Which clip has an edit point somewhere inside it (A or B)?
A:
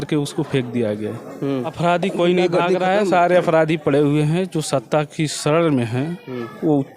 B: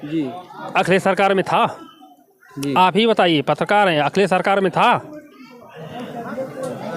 A